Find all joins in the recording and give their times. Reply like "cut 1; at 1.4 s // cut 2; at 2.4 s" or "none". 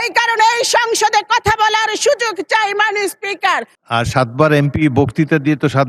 cut 1; at 3.7 s